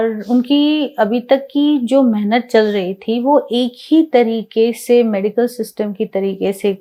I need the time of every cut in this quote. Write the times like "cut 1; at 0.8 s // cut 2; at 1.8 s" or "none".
none